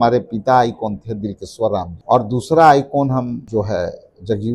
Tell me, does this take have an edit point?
yes; 2 cuts; at 1.9 s, 3.4 s

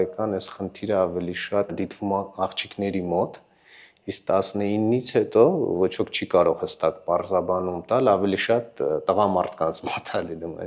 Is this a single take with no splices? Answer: yes; 0 cuts

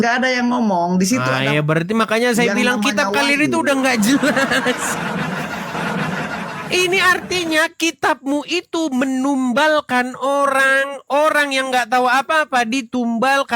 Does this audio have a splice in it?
yes; 1 cut; at 5.7 s

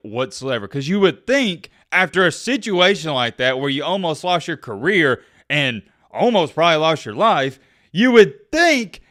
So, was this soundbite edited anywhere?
no; 0 cuts

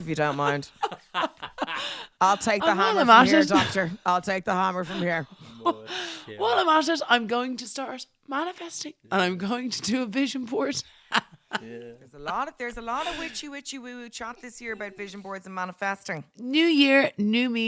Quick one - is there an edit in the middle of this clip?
yes; 1 cut; at 16.3 s

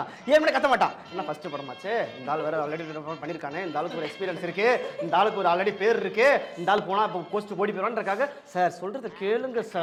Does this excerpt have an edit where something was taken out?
no; 0 cuts

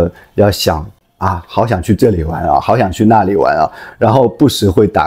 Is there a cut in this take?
no; 0 cuts

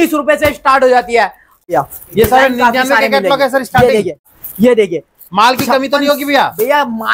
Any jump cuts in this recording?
yes; 2 cuts; at 1.6 s, 4.4 s

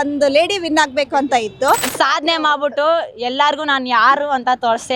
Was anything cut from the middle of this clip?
yes; 1 cut; at 1.9 s

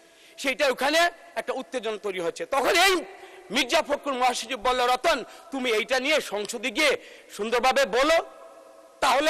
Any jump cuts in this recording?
no; 0 cuts

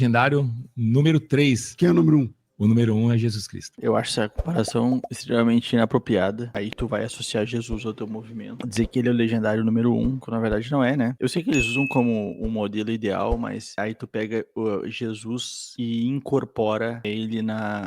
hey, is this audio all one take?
no; 2 cuts; at 1.7 s, 3.7 s

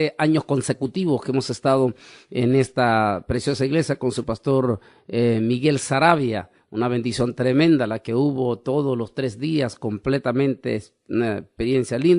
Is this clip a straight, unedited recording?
no; 1 cut; at 2.1 s

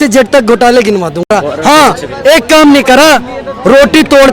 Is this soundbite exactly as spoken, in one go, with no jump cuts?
no; 1 cut; at 1.3 s

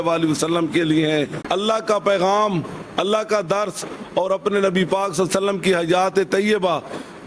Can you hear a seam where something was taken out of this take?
yes; 1 cut; at 1.4 s

